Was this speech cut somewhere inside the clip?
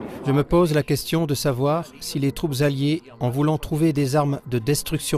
no; 0 cuts

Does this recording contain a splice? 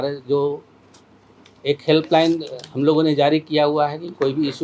no; 0 cuts

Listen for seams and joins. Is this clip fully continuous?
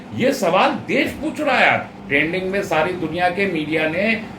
no; 1 cut; at 2.0 s

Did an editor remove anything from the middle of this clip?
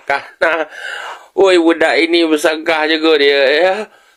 no; 0 cuts

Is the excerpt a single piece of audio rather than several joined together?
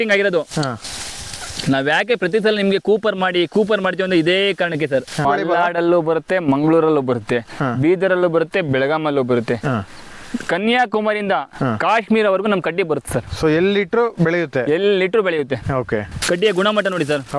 no; 2 cuts; at 5.2 s, 16.1 s

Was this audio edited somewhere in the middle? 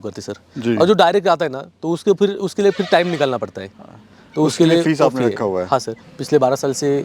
yes; 1 cut; at 6.1 s

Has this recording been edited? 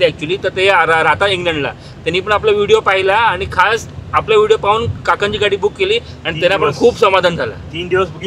no; 0 cuts

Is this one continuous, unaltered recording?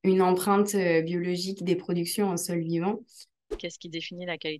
no; 1 cut; at 3.5 s

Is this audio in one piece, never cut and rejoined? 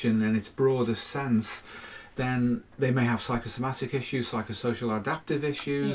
yes; 0 cuts

